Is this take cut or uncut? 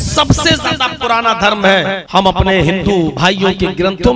cut